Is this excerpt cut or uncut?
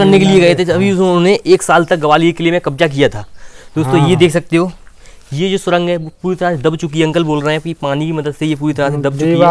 uncut